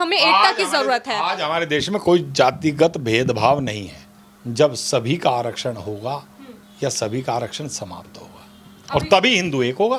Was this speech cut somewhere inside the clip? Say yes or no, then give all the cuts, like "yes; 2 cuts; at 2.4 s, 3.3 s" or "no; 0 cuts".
no; 0 cuts